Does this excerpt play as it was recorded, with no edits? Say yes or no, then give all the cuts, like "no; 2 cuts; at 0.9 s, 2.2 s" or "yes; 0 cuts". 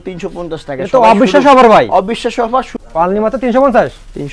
no; 1 cut; at 2.8 s